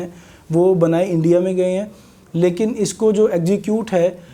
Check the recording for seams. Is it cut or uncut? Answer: uncut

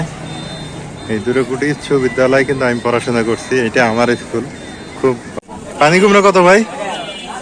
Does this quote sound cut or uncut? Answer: cut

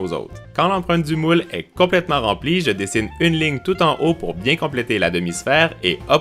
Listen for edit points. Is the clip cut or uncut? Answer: cut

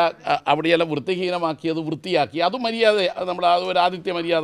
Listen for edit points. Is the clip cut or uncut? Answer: uncut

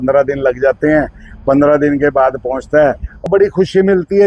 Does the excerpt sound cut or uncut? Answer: cut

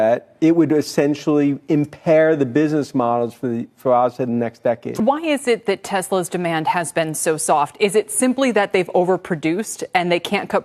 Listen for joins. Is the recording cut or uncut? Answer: cut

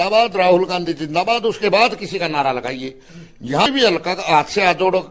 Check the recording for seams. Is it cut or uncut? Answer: cut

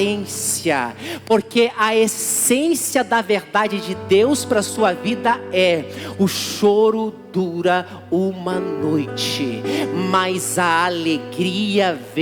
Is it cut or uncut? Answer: uncut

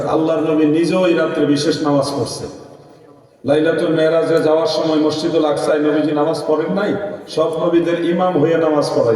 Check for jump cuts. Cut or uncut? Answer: uncut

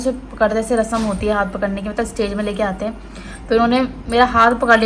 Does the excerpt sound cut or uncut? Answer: uncut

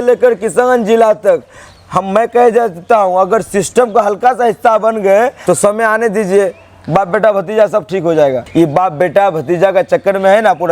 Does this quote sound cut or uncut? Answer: cut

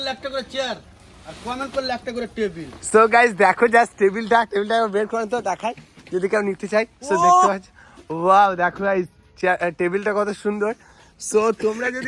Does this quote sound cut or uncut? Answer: uncut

